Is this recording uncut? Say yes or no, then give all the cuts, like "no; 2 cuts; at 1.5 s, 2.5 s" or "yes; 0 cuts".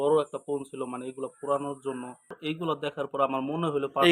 no; 1 cut; at 2.4 s